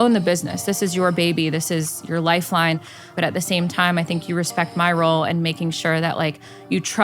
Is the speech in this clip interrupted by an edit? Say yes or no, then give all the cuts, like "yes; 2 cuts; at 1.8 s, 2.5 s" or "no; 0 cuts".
yes; 1 cut; at 3.1 s